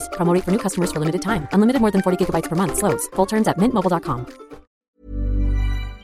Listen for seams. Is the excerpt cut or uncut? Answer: cut